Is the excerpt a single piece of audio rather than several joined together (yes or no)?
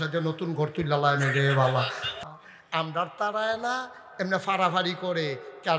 no